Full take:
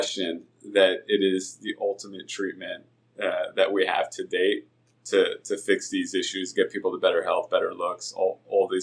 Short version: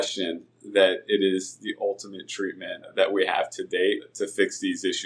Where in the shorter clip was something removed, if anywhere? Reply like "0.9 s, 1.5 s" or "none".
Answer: 2.9 s, 4.2 s